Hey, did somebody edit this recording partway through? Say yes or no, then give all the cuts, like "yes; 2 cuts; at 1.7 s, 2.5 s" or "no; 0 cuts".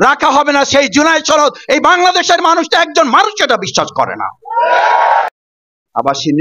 yes; 1 cut; at 5.3 s